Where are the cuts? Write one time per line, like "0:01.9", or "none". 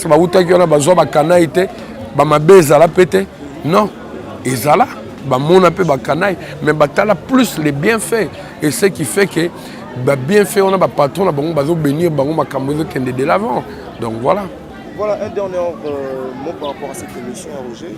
none